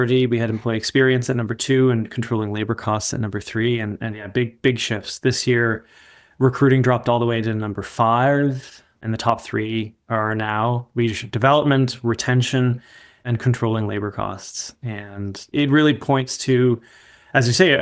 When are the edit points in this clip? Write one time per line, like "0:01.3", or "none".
none